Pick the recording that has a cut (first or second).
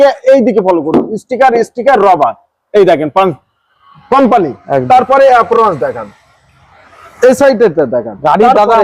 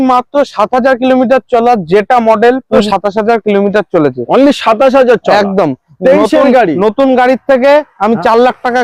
second